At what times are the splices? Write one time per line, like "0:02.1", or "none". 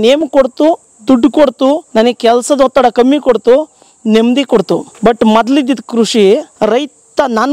0:01.8
0:04.9
0:06.5